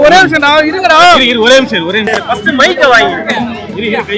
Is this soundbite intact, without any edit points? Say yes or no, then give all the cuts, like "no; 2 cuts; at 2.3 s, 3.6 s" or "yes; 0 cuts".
no; 1 cut; at 2.1 s